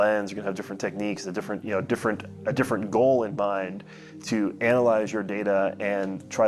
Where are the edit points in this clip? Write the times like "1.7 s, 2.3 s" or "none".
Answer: none